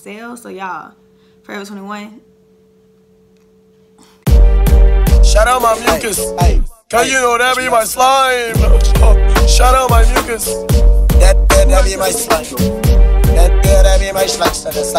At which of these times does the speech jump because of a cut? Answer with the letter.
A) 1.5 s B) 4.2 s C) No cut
B